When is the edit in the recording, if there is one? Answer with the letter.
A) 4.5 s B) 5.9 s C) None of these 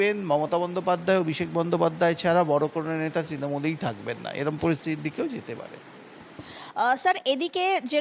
C